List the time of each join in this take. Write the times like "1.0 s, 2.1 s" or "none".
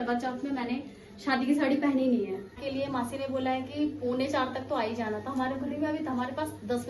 2.6 s